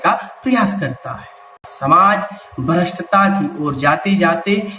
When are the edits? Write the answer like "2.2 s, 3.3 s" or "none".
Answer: 1.7 s